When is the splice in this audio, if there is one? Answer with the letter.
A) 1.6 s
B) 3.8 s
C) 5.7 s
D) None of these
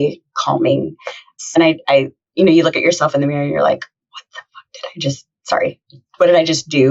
A